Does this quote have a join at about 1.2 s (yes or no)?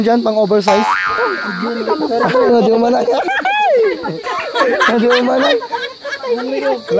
yes